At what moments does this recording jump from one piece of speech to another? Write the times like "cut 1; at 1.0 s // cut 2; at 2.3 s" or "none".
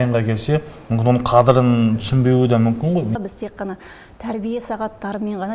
cut 1; at 3.2 s